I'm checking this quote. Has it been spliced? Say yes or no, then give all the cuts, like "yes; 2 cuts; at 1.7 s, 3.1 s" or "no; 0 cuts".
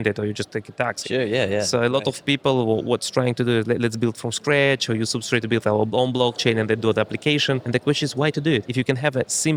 yes; 2 cuts; at 7.6 s, 8.7 s